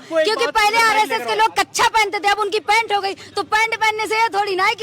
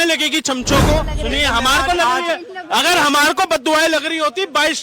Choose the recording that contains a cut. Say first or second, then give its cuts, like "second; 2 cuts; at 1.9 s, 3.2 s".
second; 1 cut; at 1.1 s